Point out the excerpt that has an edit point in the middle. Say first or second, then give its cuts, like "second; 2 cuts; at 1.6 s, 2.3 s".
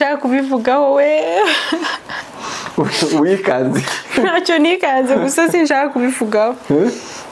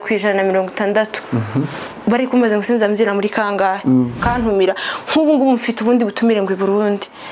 second; 1 cut; at 4.2 s